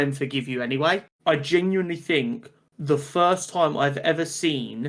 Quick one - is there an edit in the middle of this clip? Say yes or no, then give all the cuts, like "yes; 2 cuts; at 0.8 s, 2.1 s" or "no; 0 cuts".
yes; 1 cut; at 1.1 s